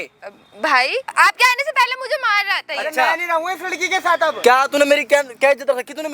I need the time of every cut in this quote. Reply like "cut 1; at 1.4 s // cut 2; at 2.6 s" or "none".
cut 1; at 1.0 s // cut 2; at 4.4 s